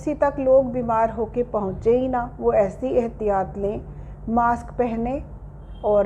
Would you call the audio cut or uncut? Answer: uncut